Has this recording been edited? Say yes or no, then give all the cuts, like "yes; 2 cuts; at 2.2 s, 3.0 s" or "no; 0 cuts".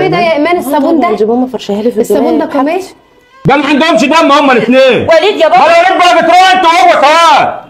yes; 1 cut; at 3.2 s